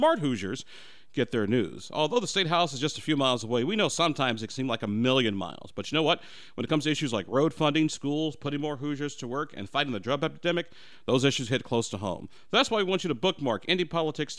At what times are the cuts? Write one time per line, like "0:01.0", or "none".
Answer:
none